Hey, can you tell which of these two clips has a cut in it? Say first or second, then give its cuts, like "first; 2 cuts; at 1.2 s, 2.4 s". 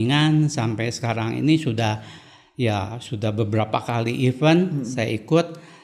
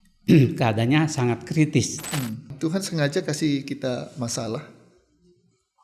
second; 1 cut; at 2.5 s